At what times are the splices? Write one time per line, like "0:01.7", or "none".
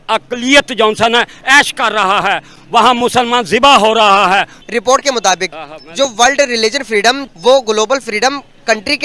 0:04.6
0:07.3